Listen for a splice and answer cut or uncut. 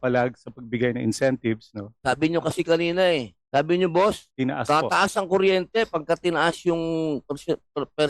cut